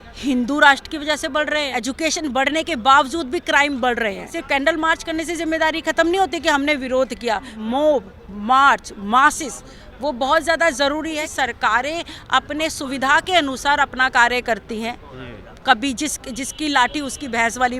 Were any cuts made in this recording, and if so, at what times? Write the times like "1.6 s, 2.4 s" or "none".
1.7 s, 4.3 s, 7.5 s, 11.2 s